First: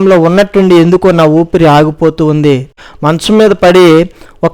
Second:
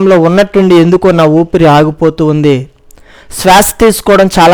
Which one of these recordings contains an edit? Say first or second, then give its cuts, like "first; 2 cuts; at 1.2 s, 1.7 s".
first; 1 cut; at 2.9 s